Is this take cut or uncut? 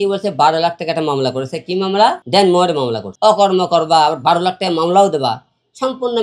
cut